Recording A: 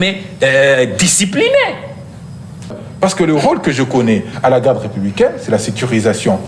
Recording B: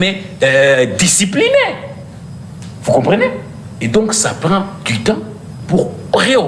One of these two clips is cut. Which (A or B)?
A